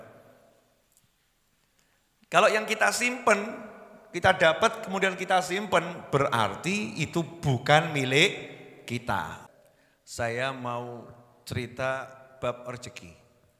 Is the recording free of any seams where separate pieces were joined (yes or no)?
no